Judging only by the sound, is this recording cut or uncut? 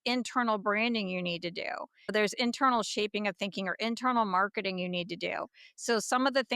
cut